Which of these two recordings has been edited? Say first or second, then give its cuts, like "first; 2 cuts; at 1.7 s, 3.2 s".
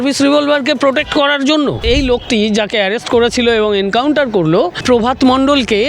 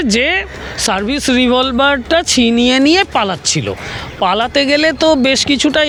first; 2 cuts; at 1.8 s, 4.8 s